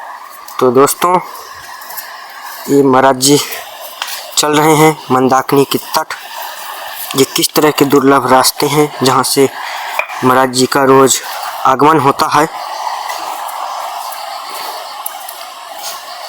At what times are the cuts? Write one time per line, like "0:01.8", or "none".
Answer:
none